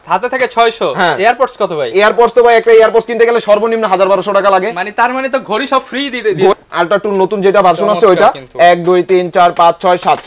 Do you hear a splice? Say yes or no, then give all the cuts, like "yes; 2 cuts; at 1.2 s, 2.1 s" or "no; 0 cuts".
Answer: yes; 1 cut; at 6.5 s